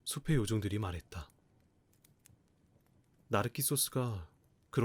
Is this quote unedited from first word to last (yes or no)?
yes